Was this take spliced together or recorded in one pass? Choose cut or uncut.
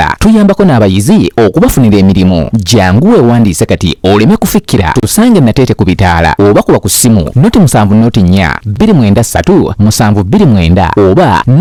uncut